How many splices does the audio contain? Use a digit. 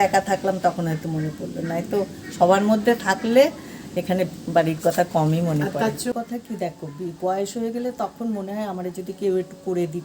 1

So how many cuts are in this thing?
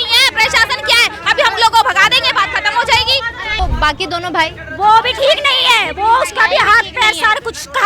1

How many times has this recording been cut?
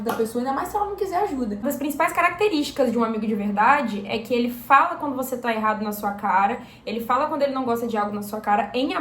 1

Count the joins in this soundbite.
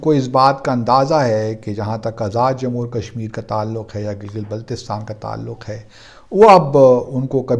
0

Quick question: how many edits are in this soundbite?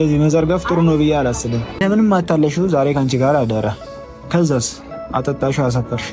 1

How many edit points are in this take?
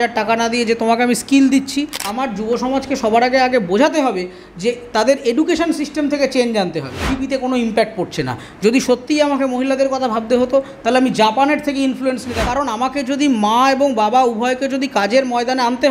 3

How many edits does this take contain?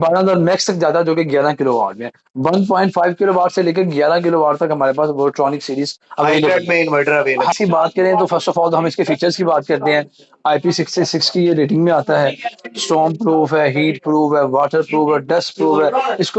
1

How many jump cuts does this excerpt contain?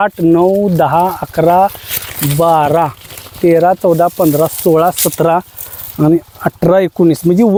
0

